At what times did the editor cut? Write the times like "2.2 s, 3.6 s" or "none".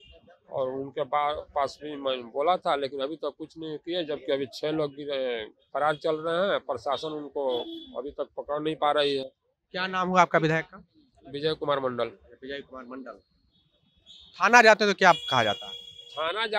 none